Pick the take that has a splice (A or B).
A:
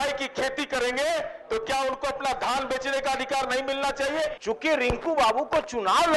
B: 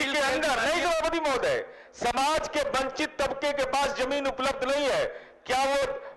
A